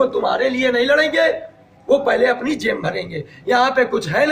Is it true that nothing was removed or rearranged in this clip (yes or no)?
yes